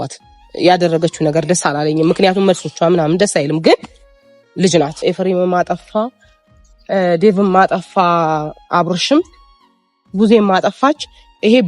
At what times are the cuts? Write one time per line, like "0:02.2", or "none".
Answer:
0:04.9